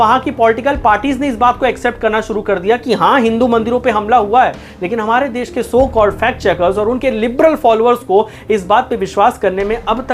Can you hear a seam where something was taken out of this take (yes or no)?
no